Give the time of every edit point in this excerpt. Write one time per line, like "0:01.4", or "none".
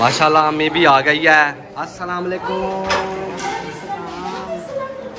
none